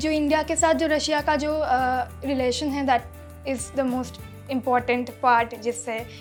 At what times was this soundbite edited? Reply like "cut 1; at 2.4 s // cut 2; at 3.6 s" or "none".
none